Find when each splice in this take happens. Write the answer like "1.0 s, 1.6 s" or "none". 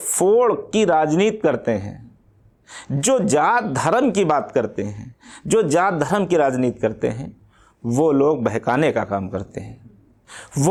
none